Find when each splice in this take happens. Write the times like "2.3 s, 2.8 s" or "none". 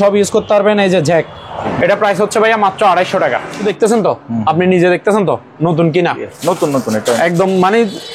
1.7 s, 3.6 s